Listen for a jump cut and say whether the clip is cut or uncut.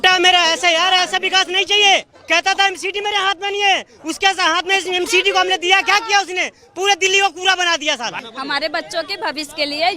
cut